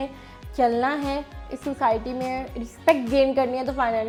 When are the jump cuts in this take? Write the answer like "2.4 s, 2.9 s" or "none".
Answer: none

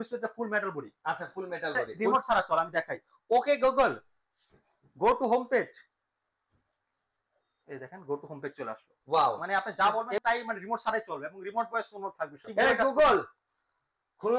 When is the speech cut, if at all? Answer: 1.9 s, 9.4 s, 12.5 s

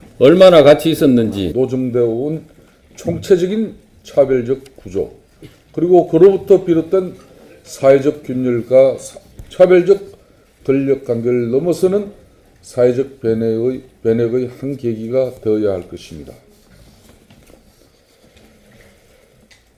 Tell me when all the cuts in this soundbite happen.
none

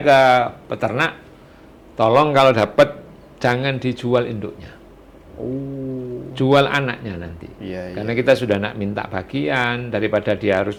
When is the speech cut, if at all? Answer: none

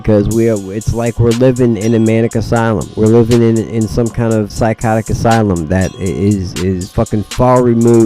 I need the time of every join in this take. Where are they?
2.9 s, 4.5 s, 6.0 s, 6.9 s

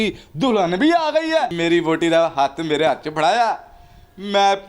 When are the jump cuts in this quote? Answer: 1.5 s

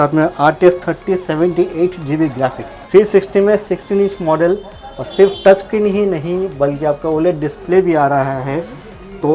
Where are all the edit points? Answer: 2.7 s

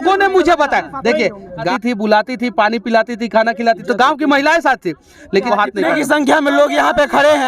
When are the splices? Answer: 1.7 s, 5.5 s

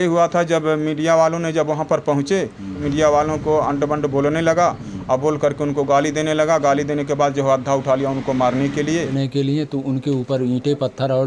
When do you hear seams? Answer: 2.8 s, 9.1 s

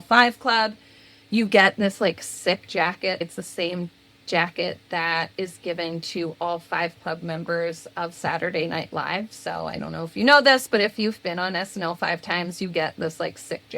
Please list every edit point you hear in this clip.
3.2 s

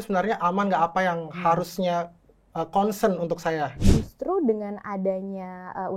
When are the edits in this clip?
3.7 s

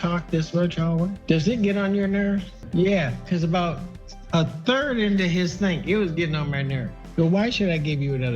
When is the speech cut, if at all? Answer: 1.2 s, 6.9 s

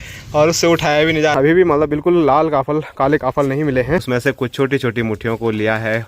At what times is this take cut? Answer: 1.3 s, 4.0 s

